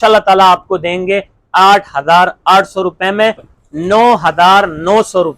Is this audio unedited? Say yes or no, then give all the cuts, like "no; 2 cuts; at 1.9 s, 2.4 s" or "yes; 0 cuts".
no; 1 cut; at 3.5 s